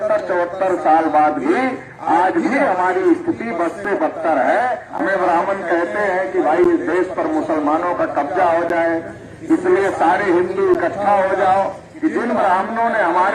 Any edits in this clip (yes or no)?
yes